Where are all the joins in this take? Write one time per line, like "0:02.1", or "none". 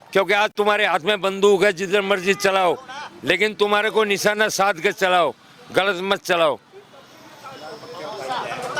none